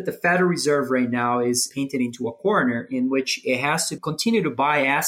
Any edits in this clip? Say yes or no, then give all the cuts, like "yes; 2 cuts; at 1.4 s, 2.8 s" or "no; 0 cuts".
yes; 2 cuts; at 1.7 s, 3.9 s